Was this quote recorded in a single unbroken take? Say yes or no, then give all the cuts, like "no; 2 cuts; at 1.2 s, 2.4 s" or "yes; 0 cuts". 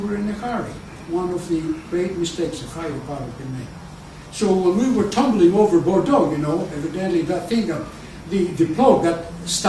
yes; 0 cuts